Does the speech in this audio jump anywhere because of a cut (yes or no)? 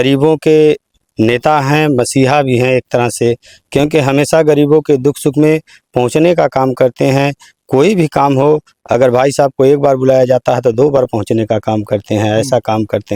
no